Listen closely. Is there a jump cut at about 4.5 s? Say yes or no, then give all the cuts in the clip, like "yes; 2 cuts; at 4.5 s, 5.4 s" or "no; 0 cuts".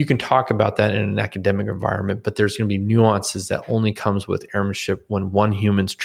no; 0 cuts